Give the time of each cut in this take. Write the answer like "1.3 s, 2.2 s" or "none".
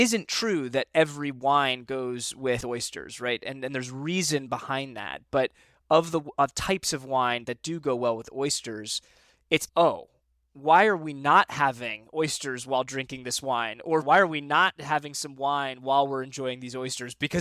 2.6 s, 14.0 s